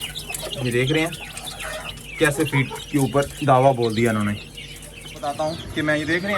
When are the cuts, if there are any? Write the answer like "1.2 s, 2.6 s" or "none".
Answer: 5.2 s